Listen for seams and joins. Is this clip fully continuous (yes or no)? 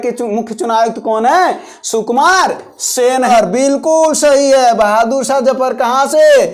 no